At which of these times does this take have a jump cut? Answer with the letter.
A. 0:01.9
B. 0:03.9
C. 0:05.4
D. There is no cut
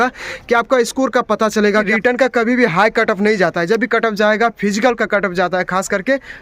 A